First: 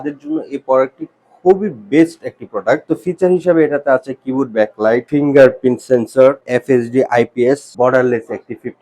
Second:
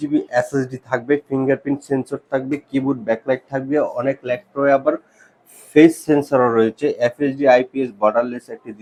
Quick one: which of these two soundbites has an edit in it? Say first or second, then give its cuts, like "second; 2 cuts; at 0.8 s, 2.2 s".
first; 4 cuts; at 2.8 s, 5.1 s, 6.4 s, 7.7 s